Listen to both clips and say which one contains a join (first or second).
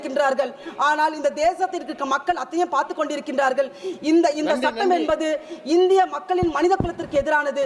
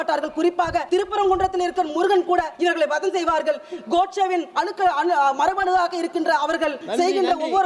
second